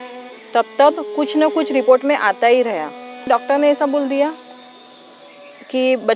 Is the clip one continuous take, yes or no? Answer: no